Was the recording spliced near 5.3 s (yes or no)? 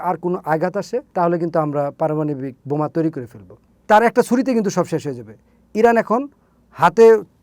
no